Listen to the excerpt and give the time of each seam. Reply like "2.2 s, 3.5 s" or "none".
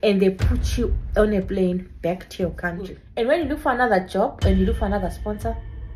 3.1 s